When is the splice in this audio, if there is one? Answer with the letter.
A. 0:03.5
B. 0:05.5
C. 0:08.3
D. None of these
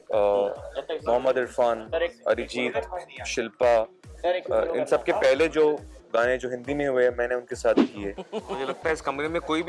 C